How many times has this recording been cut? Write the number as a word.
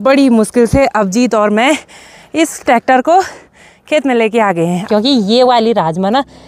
one